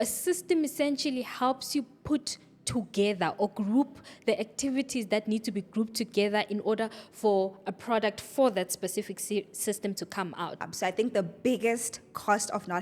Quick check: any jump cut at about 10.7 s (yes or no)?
yes